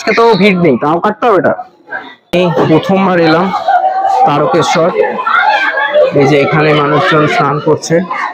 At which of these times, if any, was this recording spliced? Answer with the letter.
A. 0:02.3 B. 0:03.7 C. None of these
A